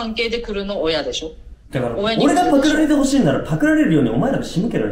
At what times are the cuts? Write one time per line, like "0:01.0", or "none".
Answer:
none